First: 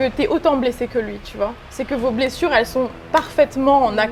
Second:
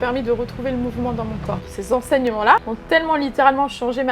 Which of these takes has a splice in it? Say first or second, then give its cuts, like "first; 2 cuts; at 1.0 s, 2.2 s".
second; 2 cuts; at 1.7 s, 2.7 s